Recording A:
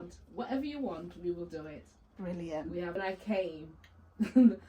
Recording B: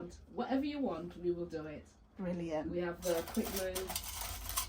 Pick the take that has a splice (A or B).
A